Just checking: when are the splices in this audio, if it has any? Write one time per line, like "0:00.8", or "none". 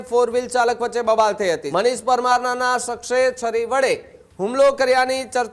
0:01.6